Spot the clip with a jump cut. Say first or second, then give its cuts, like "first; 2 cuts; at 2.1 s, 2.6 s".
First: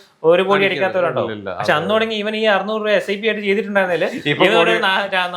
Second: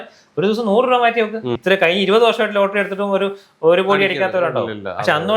second; 1 cut; at 1.5 s